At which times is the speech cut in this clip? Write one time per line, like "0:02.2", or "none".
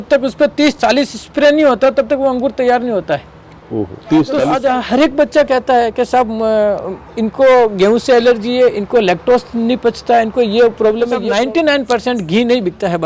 0:04.5
0:11.2